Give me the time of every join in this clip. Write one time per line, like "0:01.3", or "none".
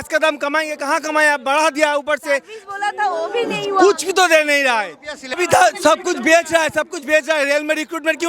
0:05.4